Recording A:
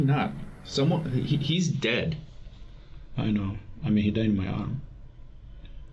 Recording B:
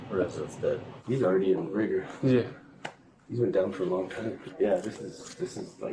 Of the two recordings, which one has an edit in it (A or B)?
B